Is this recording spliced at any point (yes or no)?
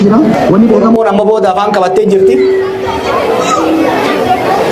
yes